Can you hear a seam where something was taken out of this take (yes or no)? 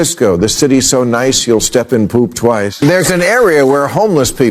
yes